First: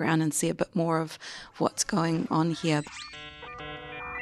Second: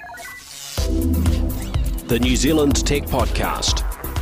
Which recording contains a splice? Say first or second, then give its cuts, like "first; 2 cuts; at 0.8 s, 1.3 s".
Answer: first; 1 cut; at 2.8 s